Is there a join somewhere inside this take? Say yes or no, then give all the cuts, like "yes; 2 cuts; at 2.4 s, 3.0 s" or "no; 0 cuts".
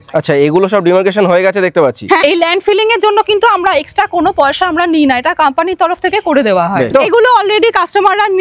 yes; 2 cuts; at 2.2 s, 6.9 s